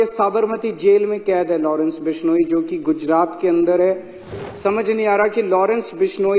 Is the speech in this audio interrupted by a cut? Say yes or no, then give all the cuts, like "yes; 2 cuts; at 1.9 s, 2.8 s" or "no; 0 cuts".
yes; 1 cut; at 4.4 s